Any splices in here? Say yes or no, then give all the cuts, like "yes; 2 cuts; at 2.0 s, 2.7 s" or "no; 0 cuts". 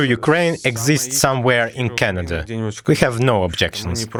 no; 0 cuts